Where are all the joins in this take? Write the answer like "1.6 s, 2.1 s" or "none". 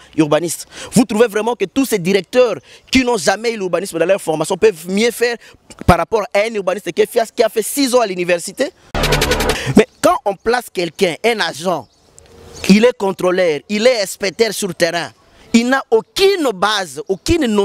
9.2 s